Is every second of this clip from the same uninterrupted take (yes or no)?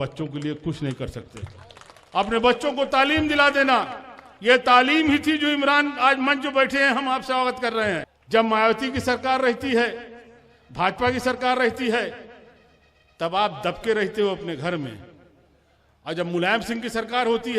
no